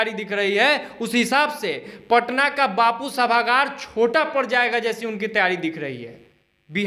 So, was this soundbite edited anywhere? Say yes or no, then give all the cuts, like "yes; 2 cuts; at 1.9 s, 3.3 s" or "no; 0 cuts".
no; 0 cuts